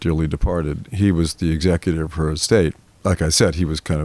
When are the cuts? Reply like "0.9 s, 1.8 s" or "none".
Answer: 2.9 s